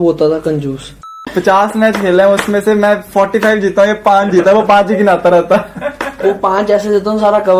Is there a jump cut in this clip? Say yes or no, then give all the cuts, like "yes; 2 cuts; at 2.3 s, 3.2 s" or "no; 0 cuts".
yes; 1 cut; at 1.2 s